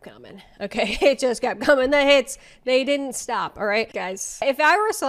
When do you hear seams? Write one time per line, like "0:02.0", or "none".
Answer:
0:03.9